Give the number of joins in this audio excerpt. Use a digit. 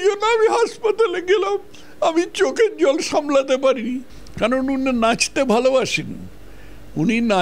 1